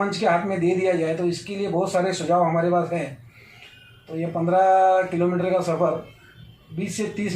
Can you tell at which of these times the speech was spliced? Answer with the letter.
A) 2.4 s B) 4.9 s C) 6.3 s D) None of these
D